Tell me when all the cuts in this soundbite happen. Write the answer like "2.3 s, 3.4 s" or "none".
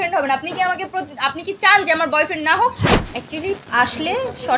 2.9 s